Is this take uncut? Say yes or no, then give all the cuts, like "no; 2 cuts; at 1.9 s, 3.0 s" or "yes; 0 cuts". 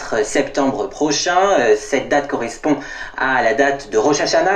no; 1 cut; at 1.8 s